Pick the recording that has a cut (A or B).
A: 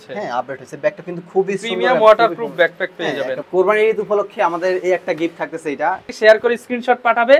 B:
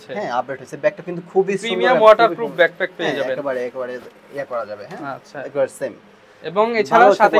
A